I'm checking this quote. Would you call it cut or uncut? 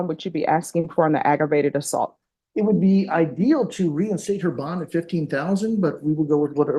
uncut